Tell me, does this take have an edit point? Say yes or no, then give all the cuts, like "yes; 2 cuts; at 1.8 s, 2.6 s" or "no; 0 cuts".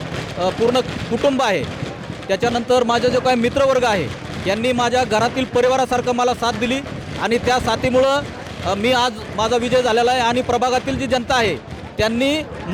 no; 0 cuts